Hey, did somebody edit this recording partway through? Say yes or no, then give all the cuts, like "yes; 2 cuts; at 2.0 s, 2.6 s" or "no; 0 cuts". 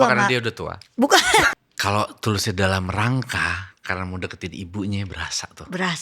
yes; 1 cut; at 1.5 s